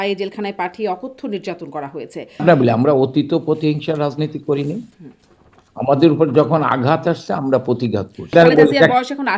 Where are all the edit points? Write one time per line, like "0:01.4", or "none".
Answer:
0:02.4
0:08.3